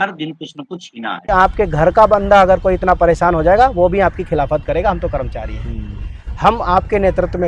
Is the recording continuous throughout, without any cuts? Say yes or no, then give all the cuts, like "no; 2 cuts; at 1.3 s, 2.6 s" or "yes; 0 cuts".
no; 1 cut; at 1.2 s